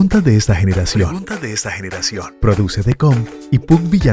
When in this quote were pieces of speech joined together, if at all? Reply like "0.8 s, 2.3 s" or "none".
none